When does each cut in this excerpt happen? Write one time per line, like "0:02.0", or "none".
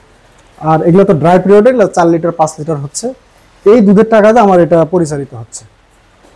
none